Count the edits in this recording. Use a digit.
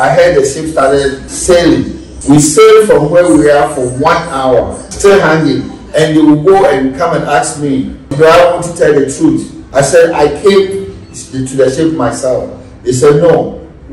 5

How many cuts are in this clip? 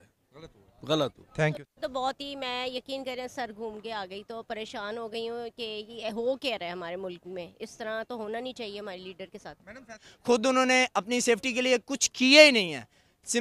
2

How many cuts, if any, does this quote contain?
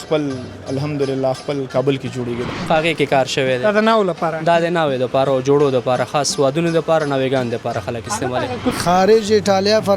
2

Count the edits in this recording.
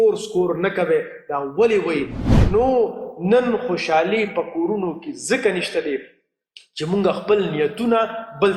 1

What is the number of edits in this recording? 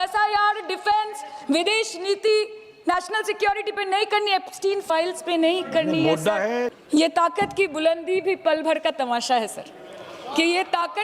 1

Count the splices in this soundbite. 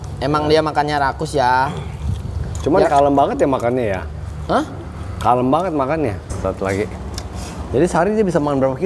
1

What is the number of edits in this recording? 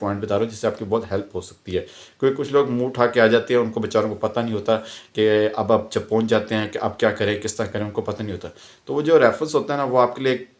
0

